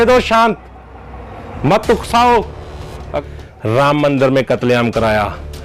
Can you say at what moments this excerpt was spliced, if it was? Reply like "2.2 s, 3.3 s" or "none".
3.0 s